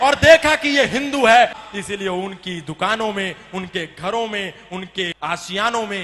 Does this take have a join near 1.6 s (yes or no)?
yes